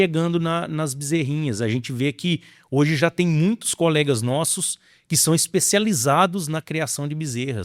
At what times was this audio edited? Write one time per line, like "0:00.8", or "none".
none